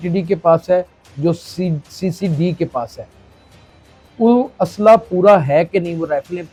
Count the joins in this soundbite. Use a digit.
0